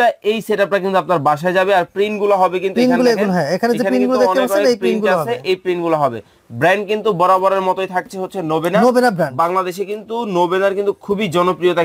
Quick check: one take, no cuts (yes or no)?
yes